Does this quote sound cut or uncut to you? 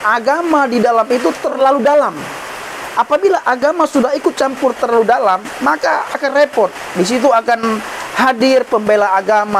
cut